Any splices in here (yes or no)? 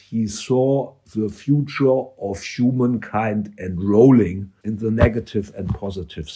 yes